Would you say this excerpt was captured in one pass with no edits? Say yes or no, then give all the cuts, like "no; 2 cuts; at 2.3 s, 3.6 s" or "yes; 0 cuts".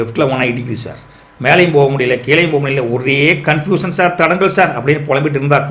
yes; 0 cuts